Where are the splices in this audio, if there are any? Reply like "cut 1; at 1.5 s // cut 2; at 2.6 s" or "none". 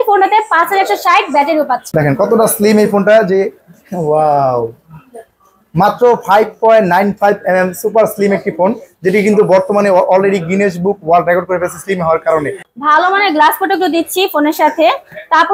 cut 1; at 1.8 s // cut 2; at 12.7 s

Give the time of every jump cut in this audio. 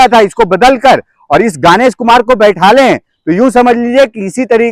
none

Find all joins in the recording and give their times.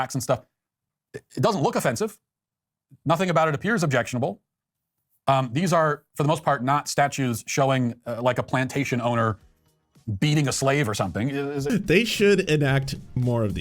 cut 1; at 11.7 s

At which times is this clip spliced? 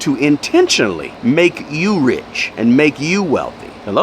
cut 1; at 1.1 s

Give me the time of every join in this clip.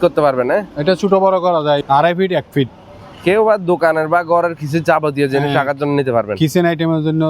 cut 1; at 1.8 s

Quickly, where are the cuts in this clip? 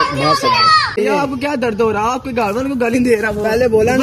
cut 1; at 1.0 s

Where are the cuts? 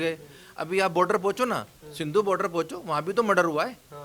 none

